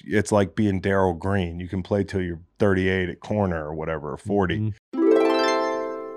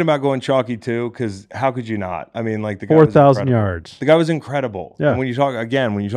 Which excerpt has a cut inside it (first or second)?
first